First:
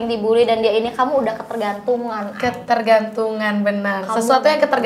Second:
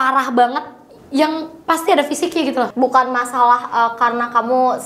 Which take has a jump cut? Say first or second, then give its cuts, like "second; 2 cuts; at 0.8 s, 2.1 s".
second; 2 cuts; at 1.5 s, 2.7 s